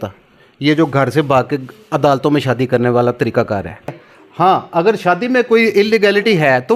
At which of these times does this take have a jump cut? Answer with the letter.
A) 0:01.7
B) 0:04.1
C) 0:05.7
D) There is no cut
B